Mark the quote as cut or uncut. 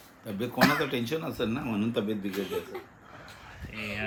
uncut